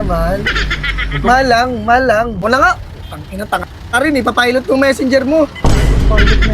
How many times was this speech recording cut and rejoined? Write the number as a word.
one